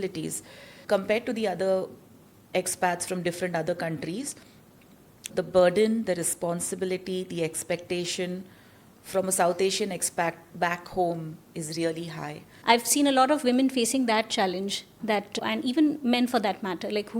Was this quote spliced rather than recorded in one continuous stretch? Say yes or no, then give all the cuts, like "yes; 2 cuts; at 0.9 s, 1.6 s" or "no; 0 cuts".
yes; 2 cuts; at 12.4 s, 14.9 s